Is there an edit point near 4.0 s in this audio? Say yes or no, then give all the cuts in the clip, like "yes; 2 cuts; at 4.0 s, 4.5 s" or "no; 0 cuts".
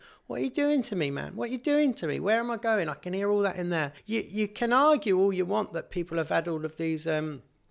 yes; 1 cut; at 4.0 s